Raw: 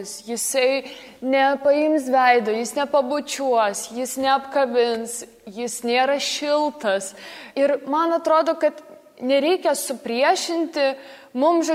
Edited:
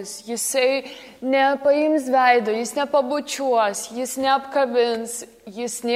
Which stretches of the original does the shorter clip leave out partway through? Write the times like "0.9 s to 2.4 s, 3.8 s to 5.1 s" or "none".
none